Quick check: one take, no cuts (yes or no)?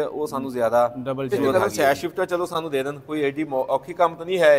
no